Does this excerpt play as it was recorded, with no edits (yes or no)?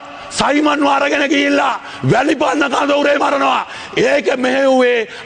yes